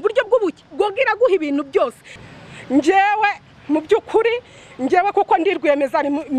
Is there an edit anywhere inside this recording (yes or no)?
yes